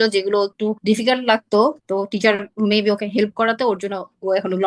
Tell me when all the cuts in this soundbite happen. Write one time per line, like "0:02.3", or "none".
none